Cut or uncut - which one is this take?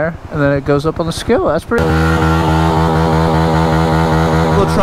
cut